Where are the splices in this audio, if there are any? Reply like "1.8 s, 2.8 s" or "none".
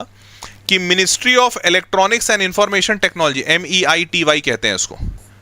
none